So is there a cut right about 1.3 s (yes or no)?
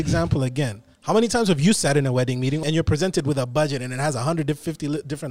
no